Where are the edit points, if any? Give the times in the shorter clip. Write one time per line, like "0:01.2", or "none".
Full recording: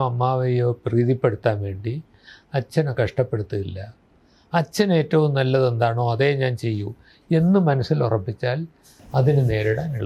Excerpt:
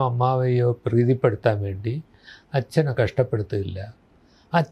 none